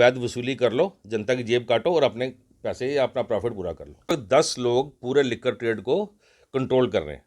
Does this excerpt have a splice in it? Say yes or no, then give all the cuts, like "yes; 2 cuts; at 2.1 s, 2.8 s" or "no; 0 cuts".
yes; 1 cut; at 4.0 s